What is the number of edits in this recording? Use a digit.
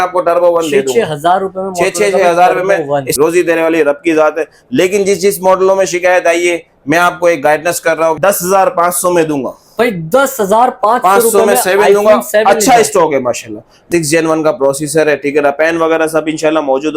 3